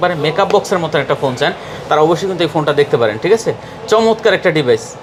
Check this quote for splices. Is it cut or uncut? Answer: uncut